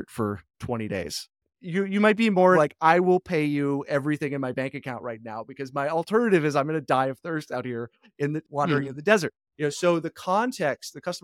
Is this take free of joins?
no; 1 cut; at 2.6 s

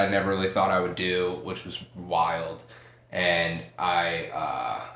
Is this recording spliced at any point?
no; 0 cuts

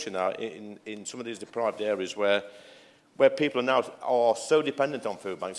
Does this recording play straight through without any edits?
yes; 0 cuts

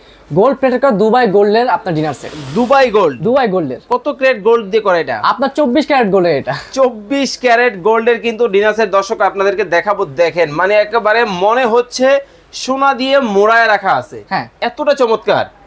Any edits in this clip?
no; 0 cuts

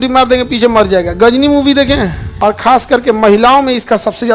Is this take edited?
yes; 1 cut; at 2.2 s

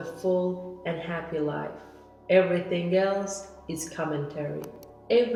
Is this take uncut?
yes; 0 cuts

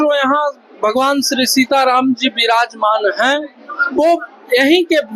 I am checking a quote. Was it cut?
no; 0 cuts

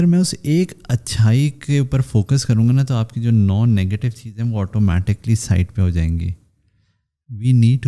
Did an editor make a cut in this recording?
no; 0 cuts

